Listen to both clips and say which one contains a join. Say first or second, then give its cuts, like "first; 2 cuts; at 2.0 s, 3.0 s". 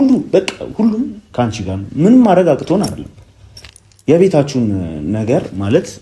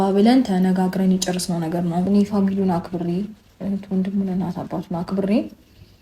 second; 1 cut; at 2.1 s